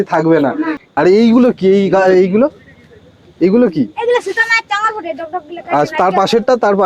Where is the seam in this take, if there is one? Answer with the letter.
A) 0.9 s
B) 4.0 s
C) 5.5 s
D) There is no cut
A